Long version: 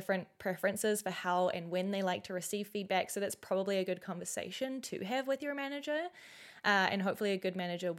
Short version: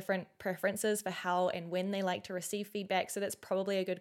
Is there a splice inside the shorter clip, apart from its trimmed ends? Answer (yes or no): no